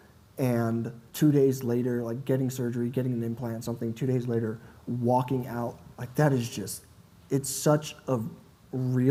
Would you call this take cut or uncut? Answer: uncut